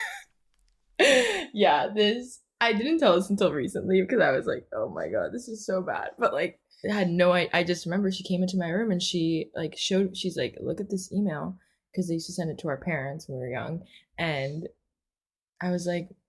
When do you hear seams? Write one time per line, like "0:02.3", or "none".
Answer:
0:06.5